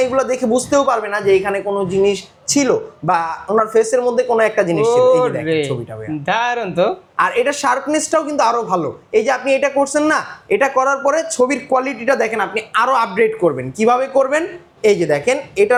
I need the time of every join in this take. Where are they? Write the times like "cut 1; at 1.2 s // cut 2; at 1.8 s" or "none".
none